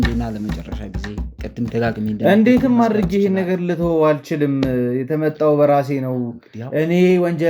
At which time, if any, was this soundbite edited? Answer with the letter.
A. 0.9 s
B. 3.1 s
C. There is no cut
C